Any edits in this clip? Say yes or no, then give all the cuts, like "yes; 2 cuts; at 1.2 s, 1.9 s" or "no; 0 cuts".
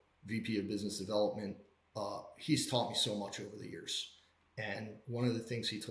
no; 0 cuts